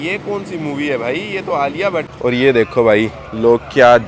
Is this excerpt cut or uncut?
cut